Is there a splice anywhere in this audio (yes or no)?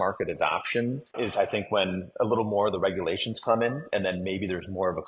yes